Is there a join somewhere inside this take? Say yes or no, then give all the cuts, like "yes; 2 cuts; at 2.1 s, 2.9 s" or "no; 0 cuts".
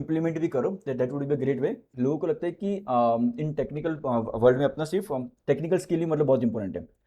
yes; 1 cut; at 1.9 s